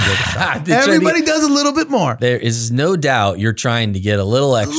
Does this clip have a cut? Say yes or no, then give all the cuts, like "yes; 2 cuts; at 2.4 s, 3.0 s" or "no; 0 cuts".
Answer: no; 0 cuts